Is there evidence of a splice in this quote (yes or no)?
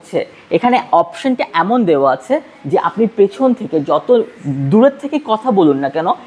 no